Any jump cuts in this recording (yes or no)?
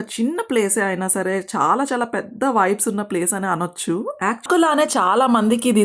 yes